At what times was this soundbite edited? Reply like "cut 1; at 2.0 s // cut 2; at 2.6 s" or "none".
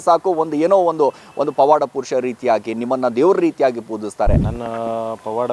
cut 1; at 4.5 s